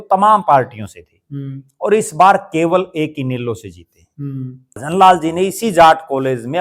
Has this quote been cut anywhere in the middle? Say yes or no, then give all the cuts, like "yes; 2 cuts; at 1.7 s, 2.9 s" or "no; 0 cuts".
yes; 1 cut; at 4.8 s